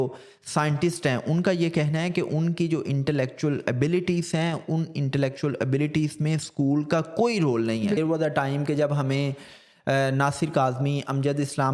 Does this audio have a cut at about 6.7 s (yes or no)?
no